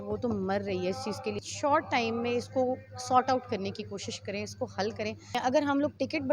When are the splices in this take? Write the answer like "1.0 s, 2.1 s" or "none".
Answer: 1.4 s, 5.4 s